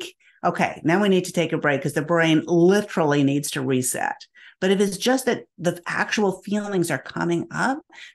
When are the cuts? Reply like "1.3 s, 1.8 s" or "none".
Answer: none